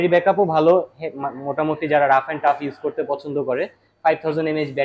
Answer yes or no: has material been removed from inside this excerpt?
no